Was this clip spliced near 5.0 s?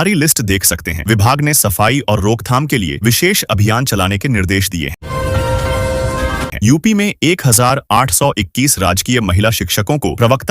yes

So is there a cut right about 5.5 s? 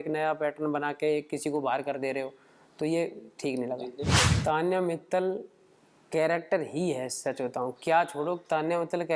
no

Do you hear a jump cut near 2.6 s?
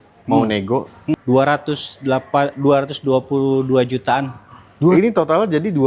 no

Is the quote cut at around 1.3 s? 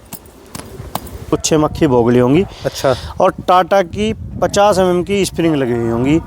yes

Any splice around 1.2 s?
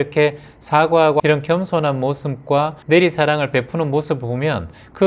yes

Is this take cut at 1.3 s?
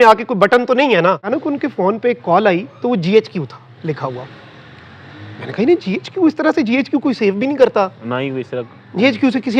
yes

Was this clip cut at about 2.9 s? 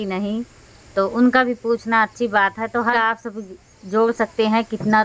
yes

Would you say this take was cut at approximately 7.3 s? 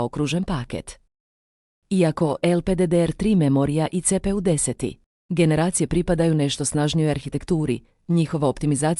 yes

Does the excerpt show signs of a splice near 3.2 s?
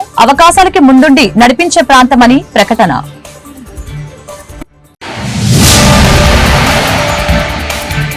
no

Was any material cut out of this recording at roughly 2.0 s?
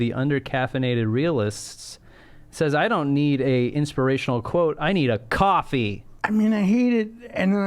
no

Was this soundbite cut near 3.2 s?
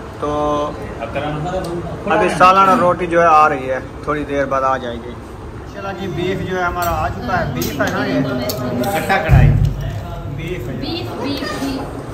no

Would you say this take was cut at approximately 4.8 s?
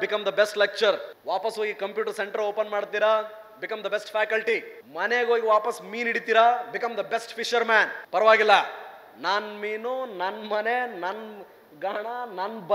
yes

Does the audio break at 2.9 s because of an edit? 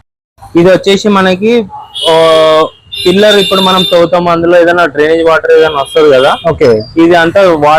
no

